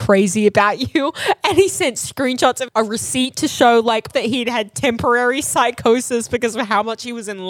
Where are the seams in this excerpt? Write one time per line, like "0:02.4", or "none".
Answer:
0:02.6
0:04.1